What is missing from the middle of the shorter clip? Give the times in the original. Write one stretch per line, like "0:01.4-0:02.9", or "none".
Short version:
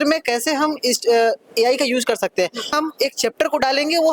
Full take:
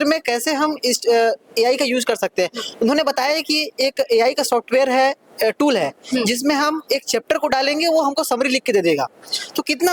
0:02.7-0:06.6